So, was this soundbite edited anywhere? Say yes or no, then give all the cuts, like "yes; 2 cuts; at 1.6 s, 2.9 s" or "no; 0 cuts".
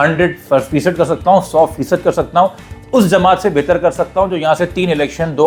no; 0 cuts